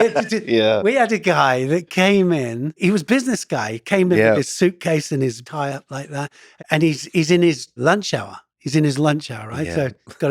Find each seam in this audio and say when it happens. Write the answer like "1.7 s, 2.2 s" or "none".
2.8 s, 5.4 s, 6.4 s, 7.7 s

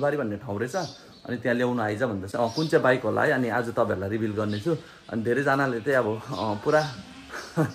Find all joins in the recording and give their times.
2.3 s

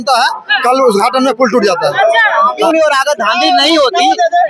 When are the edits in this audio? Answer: 2.5 s

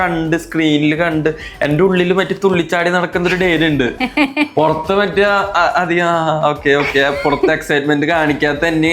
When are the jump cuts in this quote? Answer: none

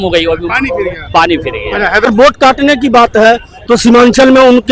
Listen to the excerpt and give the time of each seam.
2.1 s

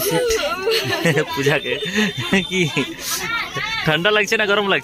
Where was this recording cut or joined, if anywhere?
none

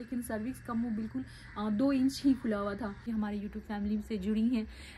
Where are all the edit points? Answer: 3.1 s

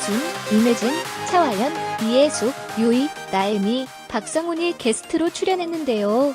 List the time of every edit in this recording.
none

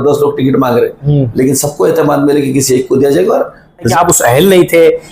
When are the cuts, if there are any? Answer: 3.9 s

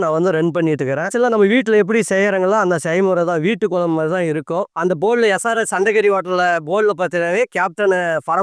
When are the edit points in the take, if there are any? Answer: 4.7 s

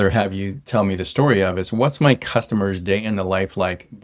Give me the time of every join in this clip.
none

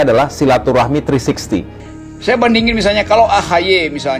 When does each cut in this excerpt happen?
1.8 s

